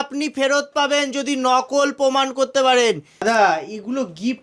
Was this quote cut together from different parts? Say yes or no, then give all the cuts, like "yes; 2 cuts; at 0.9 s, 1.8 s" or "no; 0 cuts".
yes; 1 cut; at 3.1 s